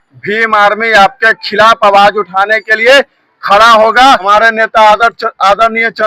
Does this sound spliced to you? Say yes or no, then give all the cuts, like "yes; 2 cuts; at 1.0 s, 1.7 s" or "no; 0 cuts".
yes; 1 cut; at 4.2 s